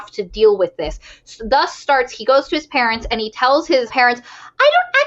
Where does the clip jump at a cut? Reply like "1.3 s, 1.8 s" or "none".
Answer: 3.9 s